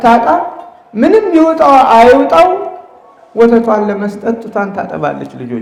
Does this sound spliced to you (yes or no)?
no